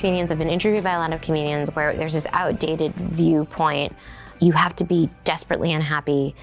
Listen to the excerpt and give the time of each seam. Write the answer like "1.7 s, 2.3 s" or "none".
4.2 s